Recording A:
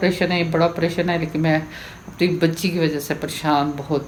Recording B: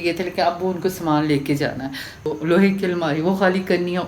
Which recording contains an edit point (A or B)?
B